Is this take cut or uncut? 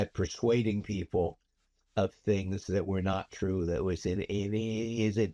uncut